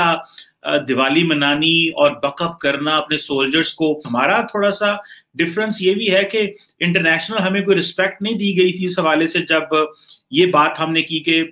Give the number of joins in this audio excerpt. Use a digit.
1